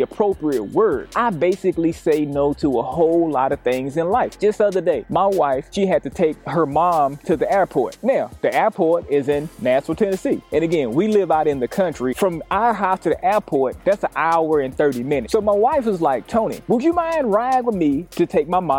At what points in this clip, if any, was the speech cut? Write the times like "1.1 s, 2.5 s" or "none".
1.1 s, 12.1 s, 15.2 s